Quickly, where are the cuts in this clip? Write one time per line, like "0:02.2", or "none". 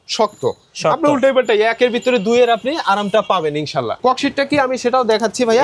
0:03.9